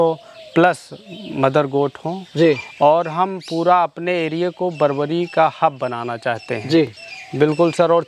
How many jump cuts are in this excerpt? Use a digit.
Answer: 0